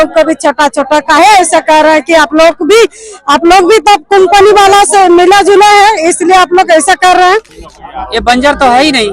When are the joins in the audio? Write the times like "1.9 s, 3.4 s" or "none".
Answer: 7.6 s